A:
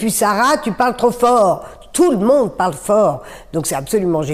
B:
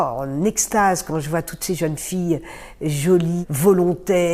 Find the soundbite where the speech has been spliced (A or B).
B